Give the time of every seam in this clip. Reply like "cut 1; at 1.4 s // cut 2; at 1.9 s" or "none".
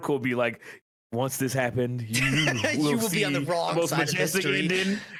none